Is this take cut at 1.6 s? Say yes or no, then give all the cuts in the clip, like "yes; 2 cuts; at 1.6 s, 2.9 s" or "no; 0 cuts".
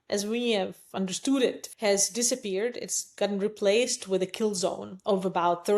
yes; 1 cut; at 1.6 s